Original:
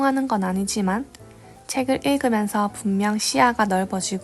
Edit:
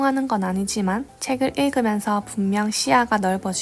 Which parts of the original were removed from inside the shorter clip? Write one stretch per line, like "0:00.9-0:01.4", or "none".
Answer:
0:01.1-0:01.6